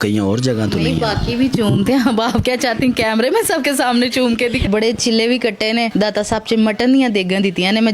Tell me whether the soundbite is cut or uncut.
cut